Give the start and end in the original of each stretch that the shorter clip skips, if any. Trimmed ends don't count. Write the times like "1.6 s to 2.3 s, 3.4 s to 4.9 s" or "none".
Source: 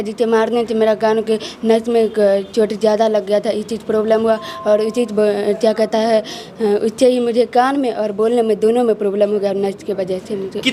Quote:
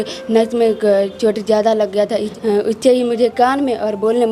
3.7 s to 6.5 s